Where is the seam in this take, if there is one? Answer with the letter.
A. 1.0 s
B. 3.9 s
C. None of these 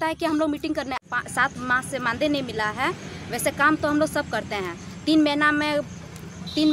A